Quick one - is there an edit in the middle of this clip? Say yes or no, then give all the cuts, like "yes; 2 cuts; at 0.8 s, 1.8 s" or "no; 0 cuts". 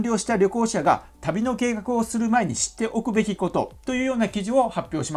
no; 0 cuts